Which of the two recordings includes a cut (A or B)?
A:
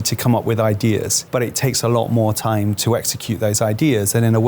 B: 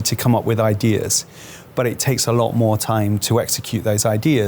A